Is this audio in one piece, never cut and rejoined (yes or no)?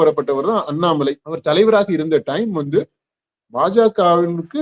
no